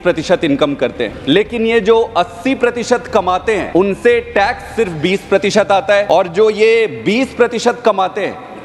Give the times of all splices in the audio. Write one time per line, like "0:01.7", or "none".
0:01.1
0:03.7
0:06.1